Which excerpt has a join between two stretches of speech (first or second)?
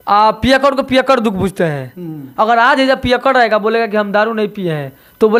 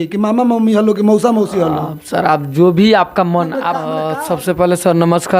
second